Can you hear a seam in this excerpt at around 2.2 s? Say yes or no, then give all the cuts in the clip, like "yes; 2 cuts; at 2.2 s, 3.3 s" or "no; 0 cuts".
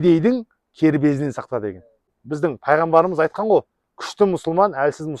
yes; 1 cut; at 2.2 s